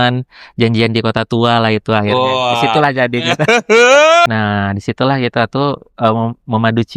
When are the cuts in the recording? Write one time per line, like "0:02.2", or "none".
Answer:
0:04.3